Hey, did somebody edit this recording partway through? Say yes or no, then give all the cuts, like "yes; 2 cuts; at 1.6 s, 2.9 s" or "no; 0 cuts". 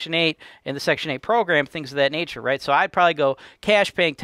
no; 0 cuts